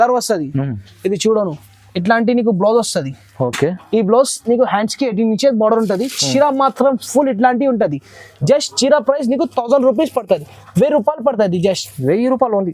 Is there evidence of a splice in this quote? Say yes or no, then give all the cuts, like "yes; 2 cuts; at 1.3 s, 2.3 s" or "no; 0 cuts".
no; 0 cuts